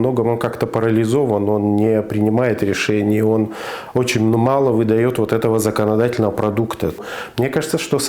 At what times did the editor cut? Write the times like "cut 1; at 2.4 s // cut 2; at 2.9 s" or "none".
cut 1; at 7.0 s